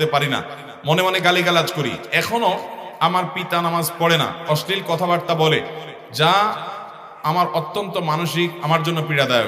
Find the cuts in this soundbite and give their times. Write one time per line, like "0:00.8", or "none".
none

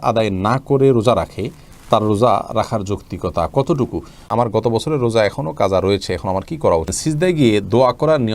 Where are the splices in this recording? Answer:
0:04.2
0:06.9

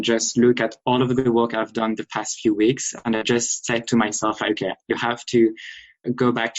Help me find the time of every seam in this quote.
none

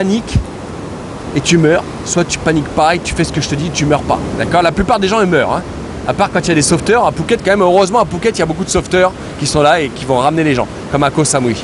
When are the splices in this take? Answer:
none

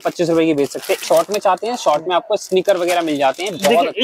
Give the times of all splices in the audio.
0:01.0

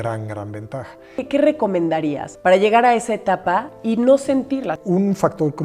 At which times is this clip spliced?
0:01.2
0:02.3
0:03.7
0:04.8

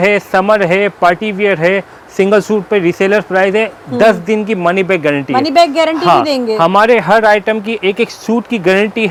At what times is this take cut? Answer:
none

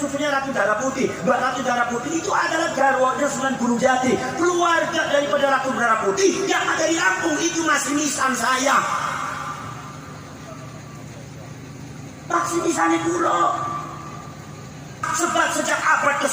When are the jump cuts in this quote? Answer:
0:15.1

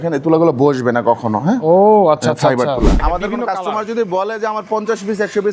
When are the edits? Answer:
0:03.0

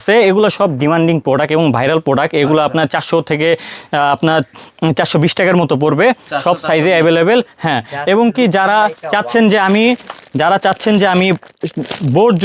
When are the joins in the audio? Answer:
none

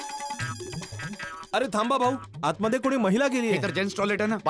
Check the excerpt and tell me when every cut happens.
0:03.6

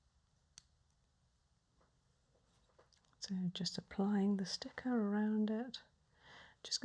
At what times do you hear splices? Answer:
0:02.7

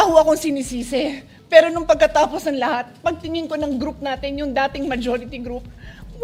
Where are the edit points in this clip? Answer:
none

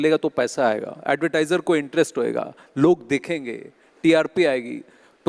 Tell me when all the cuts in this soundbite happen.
0:01.0

